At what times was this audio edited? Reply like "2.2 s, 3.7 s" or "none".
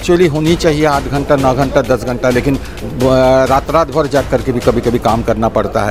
none